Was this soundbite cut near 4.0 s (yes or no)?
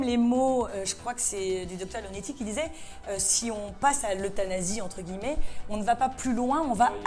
no